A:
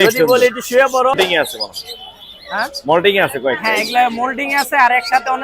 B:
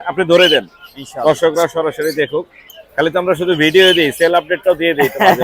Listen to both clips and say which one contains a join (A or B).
A